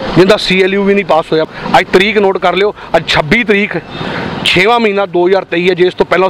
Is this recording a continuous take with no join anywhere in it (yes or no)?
no